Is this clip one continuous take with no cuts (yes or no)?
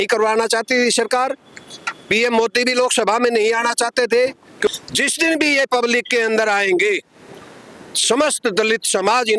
no